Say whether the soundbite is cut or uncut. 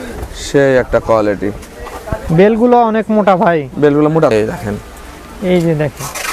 cut